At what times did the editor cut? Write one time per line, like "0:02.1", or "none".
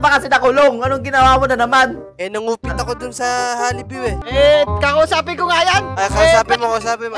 0:04.2